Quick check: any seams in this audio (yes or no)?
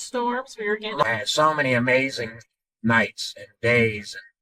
yes